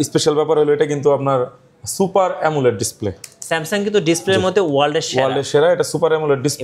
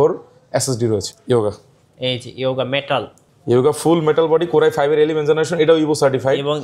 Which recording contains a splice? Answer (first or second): second